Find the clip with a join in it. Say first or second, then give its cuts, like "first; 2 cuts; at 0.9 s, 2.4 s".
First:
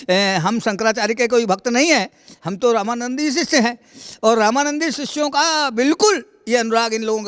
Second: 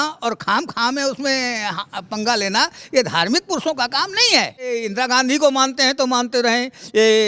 second; 1 cut; at 4.7 s